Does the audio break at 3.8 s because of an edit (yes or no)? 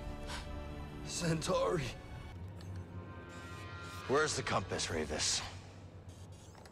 no